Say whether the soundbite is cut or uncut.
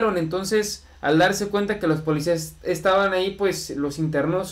uncut